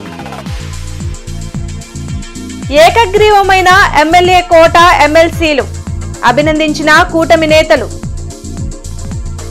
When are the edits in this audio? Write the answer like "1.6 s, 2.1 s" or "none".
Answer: 1.8 s